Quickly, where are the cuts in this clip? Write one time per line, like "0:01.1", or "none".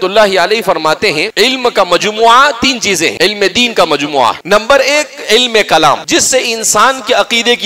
0:01.3
0:03.1
0:04.4
0:06.0